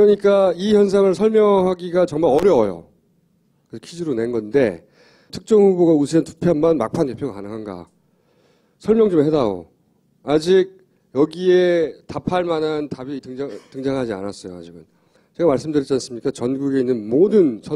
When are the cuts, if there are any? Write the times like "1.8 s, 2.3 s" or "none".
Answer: none